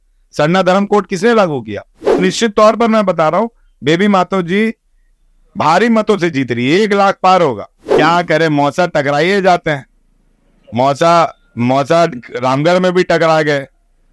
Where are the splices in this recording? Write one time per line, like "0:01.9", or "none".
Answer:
0:02.2
0:07.9